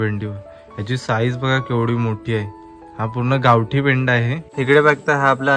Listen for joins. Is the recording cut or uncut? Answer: cut